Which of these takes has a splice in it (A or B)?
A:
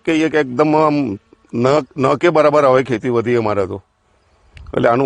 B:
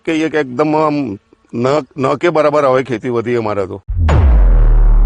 B